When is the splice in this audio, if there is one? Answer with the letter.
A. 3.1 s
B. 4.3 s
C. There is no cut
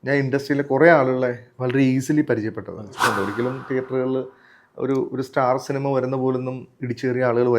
A